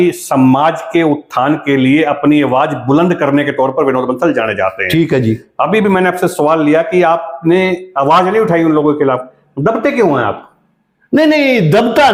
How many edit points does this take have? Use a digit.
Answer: 0